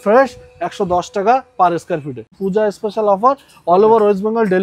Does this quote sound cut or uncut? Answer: cut